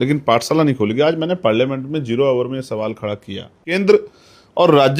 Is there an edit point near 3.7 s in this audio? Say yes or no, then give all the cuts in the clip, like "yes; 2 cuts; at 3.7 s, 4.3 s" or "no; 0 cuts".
yes; 1 cut; at 3.7 s